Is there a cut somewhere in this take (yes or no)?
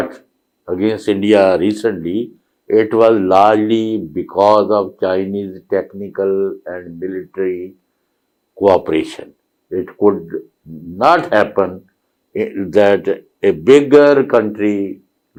no